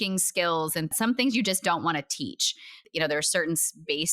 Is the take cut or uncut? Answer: cut